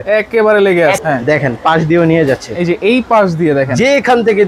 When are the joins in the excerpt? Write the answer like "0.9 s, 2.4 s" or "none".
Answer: 1.0 s